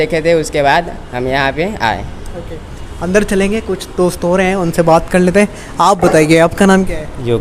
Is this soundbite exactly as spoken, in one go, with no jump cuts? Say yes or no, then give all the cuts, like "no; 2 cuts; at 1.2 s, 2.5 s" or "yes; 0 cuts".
yes; 0 cuts